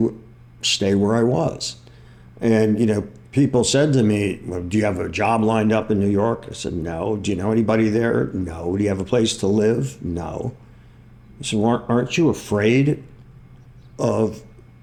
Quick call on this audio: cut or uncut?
uncut